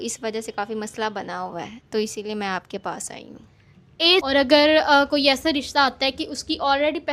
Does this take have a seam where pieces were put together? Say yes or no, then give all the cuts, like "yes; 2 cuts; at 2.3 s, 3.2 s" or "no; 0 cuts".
no; 0 cuts